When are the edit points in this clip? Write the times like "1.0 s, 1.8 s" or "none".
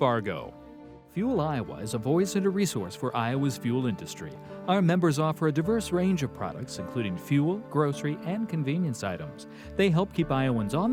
none